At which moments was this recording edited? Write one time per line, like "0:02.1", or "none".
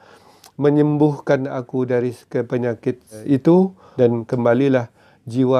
0:03.2
0:03.8